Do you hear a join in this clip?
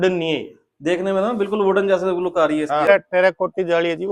yes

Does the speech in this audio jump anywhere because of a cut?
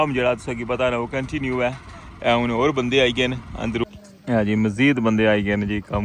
yes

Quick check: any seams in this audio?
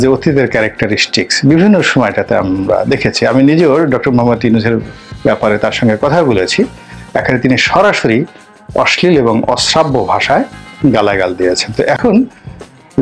no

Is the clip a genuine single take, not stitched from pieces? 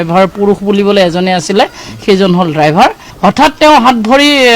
no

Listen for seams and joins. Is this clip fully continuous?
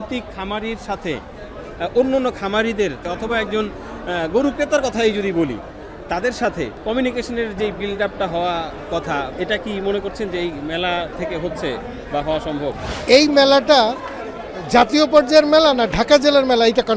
no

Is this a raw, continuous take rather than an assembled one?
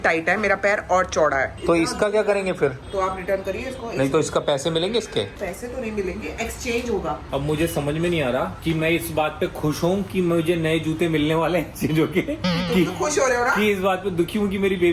no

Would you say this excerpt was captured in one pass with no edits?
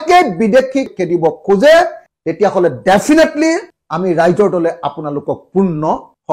yes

